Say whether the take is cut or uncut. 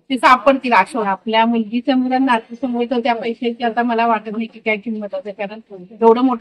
cut